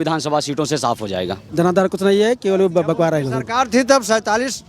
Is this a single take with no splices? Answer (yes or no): no